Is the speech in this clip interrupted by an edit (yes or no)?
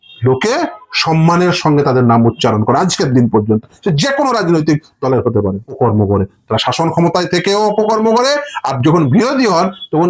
yes